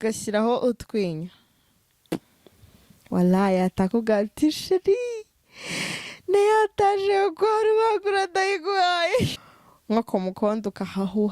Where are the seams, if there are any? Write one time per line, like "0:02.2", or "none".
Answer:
0:09.4